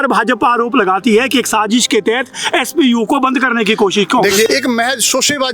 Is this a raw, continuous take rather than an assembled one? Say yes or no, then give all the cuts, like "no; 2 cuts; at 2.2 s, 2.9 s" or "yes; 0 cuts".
no; 1 cut; at 4.5 s